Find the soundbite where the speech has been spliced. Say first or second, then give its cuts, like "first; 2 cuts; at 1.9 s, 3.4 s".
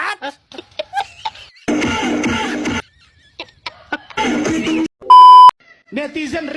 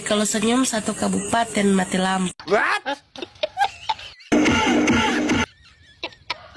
first; 2 cuts; at 4.9 s, 5.7 s